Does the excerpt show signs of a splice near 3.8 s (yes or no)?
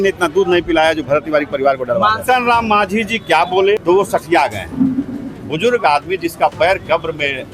yes